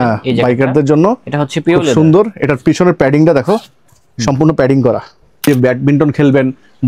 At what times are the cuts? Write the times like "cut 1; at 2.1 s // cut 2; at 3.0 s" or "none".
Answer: cut 1; at 5.4 s